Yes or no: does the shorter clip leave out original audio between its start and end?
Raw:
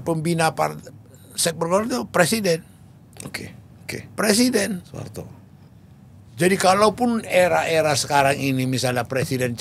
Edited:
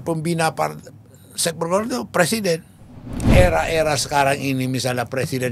yes